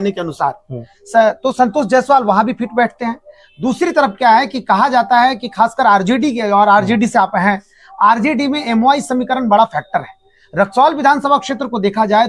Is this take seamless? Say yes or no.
yes